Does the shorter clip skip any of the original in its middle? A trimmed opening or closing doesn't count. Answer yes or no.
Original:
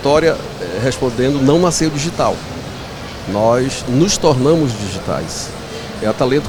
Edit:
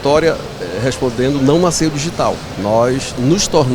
yes